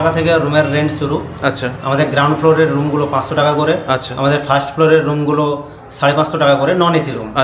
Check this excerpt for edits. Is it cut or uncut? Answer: uncut